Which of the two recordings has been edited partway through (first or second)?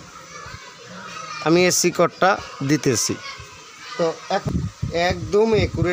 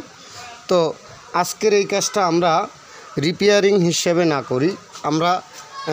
first